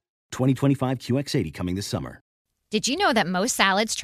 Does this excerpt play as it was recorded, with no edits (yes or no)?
no